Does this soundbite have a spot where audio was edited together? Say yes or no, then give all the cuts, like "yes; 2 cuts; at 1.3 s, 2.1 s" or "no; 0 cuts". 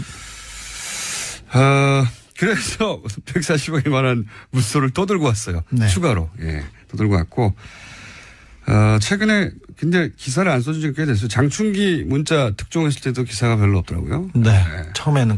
no; 0 cuts